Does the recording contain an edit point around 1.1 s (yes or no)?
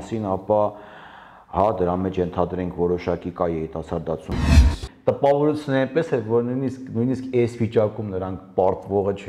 no